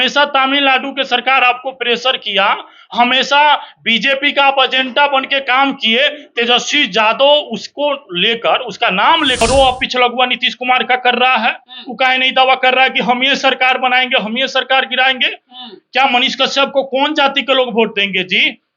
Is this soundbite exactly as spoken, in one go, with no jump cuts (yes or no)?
no